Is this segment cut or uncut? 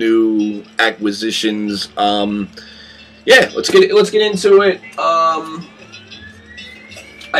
uncut